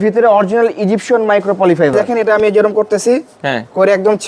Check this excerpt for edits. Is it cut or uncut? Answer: cut